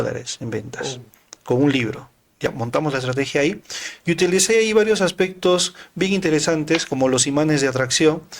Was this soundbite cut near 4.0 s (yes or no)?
no